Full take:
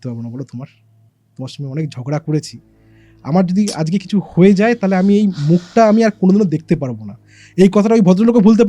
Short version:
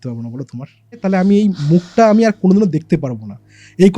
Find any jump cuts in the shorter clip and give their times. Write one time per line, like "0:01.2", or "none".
0:01.0